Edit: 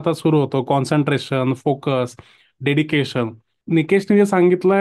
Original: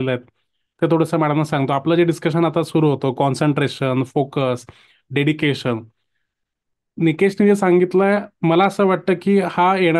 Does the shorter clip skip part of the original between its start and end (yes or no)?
yes